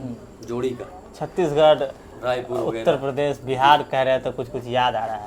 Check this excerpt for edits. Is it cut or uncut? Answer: uncut